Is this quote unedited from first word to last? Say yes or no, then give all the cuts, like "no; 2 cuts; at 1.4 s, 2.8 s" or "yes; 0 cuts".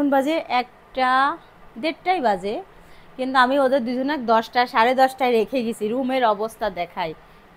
yes; 0 cuts